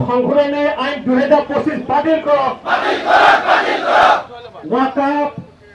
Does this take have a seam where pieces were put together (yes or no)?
no